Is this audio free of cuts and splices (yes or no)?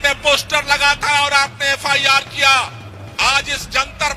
yes